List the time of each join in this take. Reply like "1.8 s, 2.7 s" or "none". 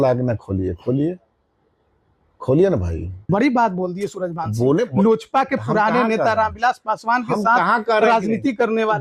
3.3 s